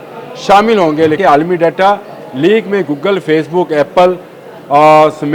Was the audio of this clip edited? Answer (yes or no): yes